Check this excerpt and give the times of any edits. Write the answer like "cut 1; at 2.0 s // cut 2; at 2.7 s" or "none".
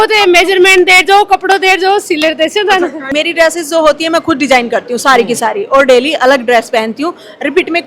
cut 1; at 3.1 s